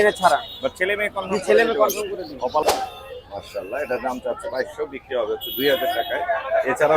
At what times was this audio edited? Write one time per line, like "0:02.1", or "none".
0:02.6